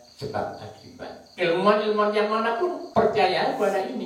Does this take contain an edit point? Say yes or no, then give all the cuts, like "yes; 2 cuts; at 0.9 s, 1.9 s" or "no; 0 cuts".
yes; 2 cuts; at 1.3 s, 2.8 s